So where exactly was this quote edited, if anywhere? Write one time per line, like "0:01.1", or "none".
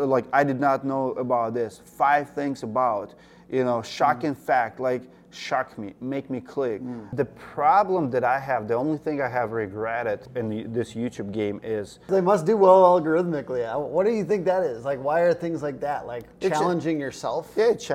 0:07.0
0:10.3
0:12.1